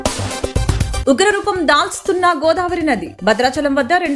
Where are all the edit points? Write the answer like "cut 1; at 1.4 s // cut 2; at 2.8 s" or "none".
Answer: cut 1; at 1.0 s